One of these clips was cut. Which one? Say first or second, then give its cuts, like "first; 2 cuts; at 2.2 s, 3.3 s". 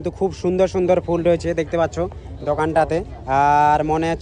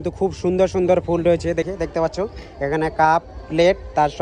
second; 1 cut; at 1.7 s